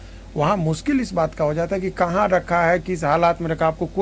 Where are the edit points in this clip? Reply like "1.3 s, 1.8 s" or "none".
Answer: none